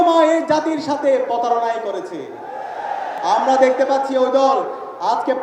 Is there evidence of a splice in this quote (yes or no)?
yes